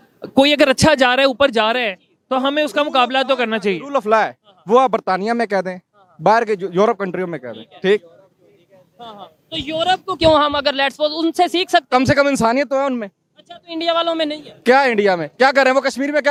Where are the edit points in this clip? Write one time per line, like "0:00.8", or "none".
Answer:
none